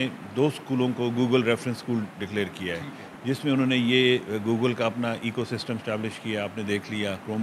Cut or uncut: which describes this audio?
uncut